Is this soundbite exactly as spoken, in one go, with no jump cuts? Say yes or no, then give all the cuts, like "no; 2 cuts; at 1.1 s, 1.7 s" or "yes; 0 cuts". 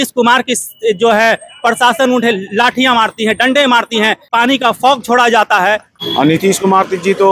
no; 2 cuts; at 4.3 s, 5.9 s